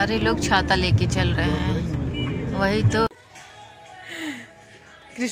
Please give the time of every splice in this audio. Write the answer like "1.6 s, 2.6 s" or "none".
3.1 s